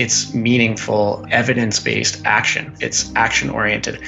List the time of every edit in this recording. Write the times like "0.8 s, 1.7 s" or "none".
1.2 s, 2.6 s